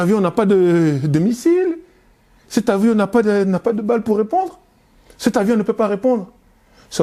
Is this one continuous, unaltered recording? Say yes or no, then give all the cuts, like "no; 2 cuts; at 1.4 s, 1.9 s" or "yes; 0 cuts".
yes; 0 cuts